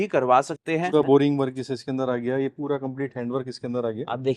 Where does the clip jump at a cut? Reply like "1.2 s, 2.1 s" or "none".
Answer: 0.9 s